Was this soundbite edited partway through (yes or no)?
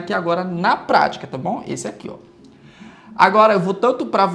no